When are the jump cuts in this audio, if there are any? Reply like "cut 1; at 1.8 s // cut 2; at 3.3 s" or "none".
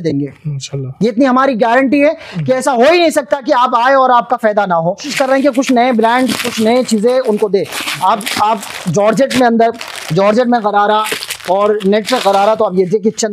cut 1; at 5.1 s